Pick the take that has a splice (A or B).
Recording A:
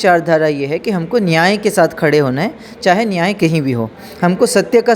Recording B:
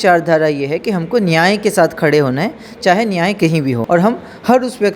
B